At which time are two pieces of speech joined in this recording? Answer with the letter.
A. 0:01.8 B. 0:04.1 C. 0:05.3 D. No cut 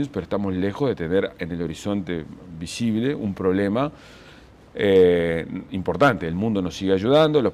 B